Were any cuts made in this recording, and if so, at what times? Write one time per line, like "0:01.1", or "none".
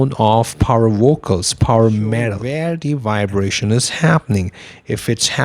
0:02.4